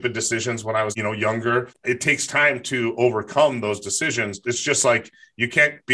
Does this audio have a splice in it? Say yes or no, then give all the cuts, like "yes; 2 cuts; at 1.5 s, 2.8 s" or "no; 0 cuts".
yes; 3 cuts; at 0.9 s, 1.7 s, 4.4 s